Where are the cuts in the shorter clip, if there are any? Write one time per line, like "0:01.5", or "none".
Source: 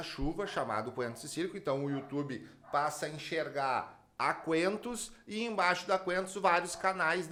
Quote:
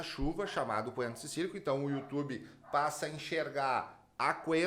none